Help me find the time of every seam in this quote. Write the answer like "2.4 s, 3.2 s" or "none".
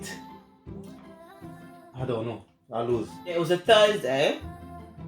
3.4 s